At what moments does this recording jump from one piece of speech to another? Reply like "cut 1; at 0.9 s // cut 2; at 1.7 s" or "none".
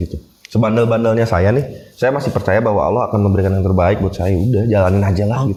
none